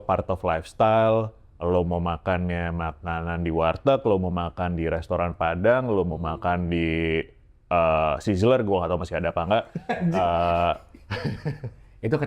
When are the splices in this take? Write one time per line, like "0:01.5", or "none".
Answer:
none